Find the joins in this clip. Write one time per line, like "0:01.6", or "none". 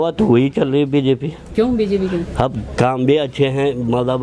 none